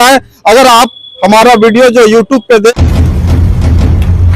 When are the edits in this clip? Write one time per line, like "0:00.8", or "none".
0:02.7

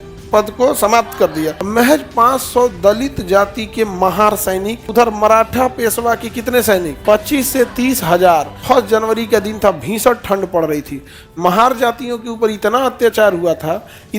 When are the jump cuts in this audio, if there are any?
0:01.6
0:04.8
0:06.9
0:08.6

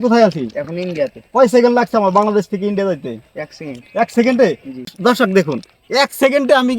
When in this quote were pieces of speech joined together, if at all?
0:04.9

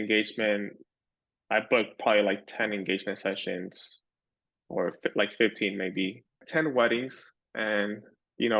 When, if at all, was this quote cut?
0:06.4

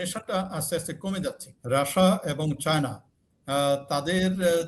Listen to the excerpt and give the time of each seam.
0:01.5

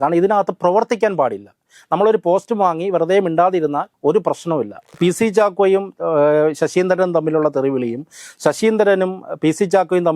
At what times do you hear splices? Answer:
0:04.9

